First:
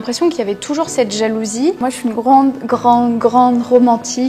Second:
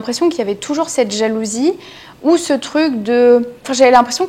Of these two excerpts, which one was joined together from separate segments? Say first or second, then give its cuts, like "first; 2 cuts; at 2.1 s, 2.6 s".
first; 1 cut; at 1.8 s